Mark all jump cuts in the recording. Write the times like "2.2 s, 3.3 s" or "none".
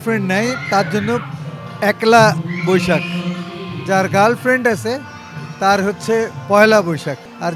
none